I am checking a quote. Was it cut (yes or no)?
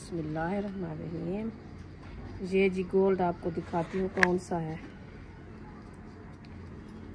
yes